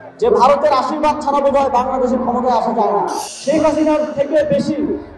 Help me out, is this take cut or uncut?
cut